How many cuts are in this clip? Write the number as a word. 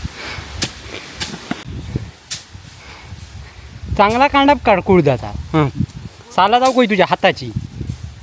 one